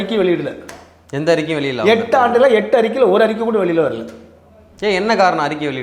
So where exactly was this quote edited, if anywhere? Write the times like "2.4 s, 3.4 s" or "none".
none